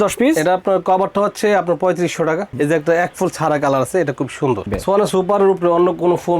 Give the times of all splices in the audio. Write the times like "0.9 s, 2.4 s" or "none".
2.5 s, 4.7 s

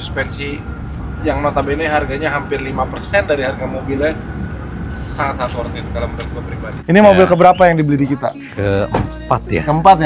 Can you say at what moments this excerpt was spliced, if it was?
6.7 s, 8.4 s

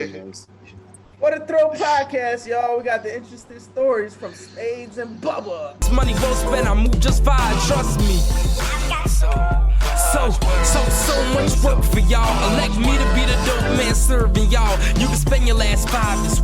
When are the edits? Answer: 5.9 s

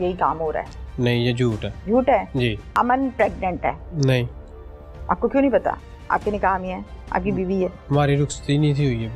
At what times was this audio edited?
1.7 s, 2.6 s, 3.9 s

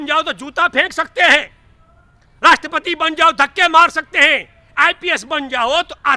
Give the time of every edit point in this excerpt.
none

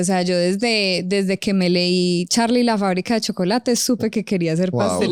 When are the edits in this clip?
none

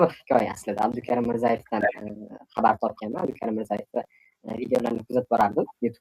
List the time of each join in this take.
3.2 s

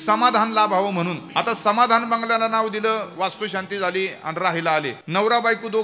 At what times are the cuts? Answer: 1.2 s, 5.0 s

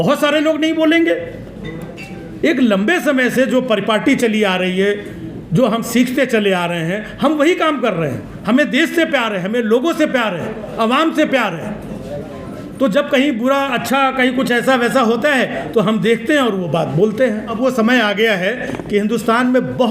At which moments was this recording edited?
17.5 s

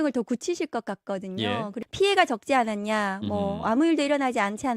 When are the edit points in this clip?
1.8 s

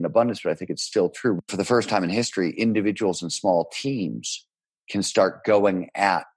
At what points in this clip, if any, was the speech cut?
1.4 s

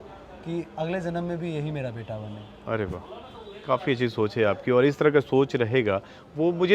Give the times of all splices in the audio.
none

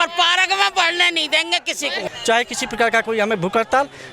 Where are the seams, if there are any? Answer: 2.1 s

